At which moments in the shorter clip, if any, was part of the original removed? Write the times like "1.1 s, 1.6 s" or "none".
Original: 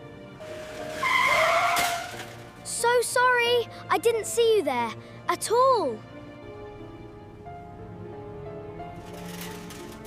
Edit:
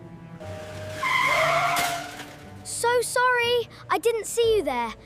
none

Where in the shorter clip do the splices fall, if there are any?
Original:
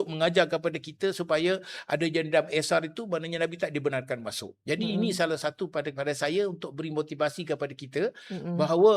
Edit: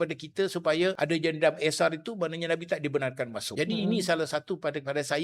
1.0 s, 3.4 s

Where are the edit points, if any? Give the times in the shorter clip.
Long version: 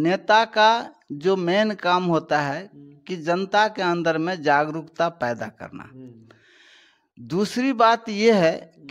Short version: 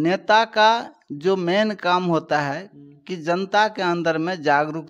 none

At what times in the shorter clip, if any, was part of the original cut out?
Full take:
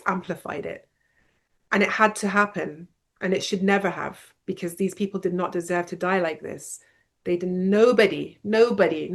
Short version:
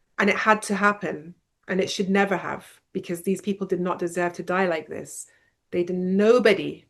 none

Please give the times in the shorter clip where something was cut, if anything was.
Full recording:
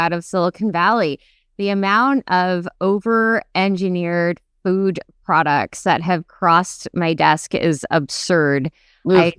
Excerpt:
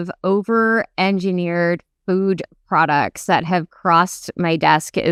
none

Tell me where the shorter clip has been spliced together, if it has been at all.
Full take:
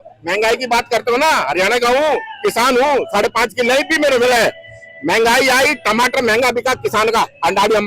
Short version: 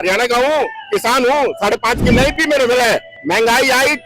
3.1 s

